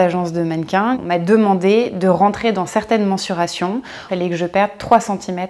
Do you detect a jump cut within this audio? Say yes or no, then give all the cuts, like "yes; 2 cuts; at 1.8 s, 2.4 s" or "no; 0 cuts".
yes; 2 cuts; at 1.0 s, 4.1 s